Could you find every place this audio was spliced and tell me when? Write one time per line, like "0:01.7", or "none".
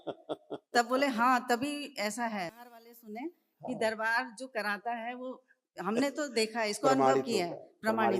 0:02.7

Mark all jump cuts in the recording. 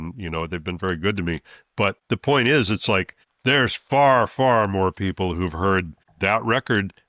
none

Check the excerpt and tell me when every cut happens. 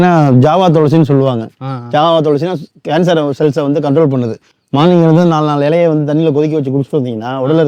none

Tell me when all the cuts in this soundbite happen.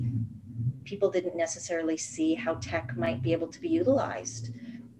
none

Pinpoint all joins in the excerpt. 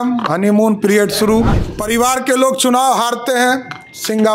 0:01.6

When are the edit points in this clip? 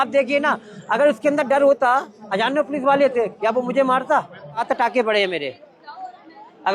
0:04.6

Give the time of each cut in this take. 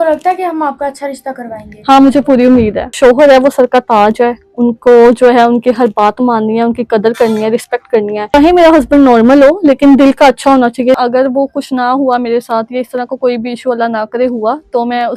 0:02.9
0:08.2
0:11.0

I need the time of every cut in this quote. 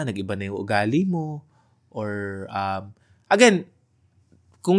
none

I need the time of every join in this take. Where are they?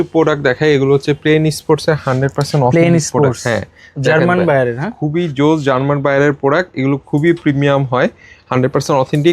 none

